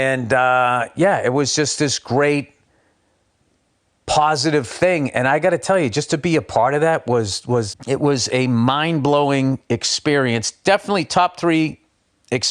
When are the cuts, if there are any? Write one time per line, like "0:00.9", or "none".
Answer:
0:07.8